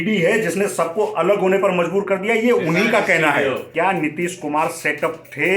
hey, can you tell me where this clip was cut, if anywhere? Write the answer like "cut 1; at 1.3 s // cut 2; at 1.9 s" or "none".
cut 1; at 3.7 s